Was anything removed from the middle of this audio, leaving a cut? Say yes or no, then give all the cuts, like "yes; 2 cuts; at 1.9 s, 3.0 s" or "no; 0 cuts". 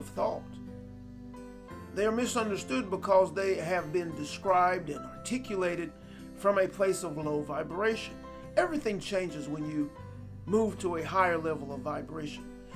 no; 0 cuts